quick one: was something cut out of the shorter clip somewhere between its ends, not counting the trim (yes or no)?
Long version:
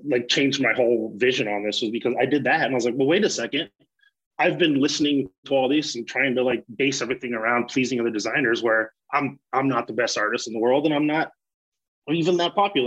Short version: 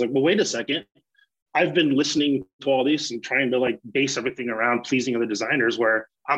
no